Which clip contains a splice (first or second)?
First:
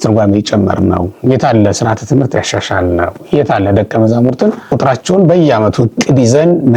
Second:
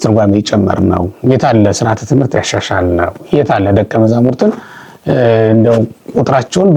first